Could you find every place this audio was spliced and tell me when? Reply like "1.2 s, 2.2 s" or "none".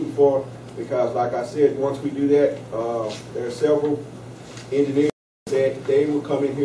1.8 s